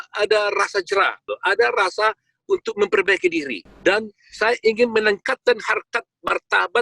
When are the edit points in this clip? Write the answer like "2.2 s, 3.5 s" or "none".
1.3 s, 3.6 s